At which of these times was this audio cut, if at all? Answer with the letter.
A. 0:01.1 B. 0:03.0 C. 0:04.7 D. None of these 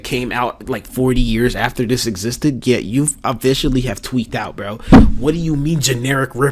D